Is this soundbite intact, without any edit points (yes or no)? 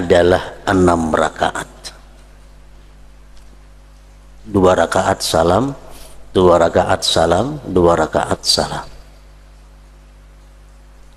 yes